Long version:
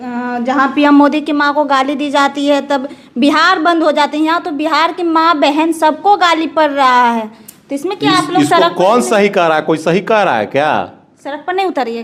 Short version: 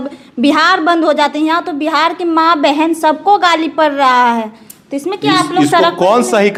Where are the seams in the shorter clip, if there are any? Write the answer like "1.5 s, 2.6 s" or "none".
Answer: none